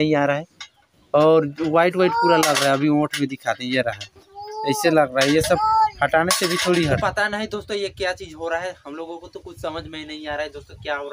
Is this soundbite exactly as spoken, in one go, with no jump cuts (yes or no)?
no